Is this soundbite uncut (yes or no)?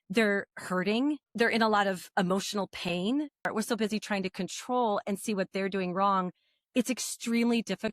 no